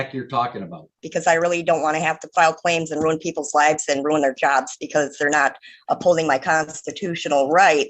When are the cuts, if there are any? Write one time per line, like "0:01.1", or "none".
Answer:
0:01.1